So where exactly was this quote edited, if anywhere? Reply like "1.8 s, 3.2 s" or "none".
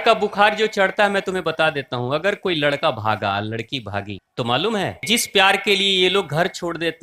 4.2 s, 5.0 s